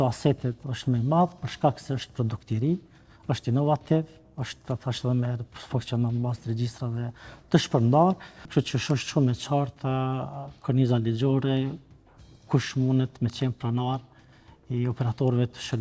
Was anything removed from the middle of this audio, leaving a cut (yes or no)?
yes